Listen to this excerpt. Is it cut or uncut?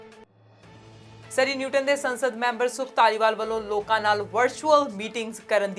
uncut